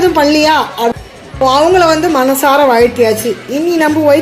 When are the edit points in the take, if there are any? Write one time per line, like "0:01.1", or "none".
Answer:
0:00.9